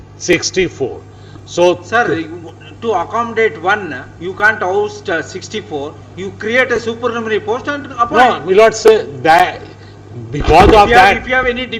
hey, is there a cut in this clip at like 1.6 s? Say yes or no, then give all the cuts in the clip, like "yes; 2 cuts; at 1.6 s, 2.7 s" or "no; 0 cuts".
no; 0 cuts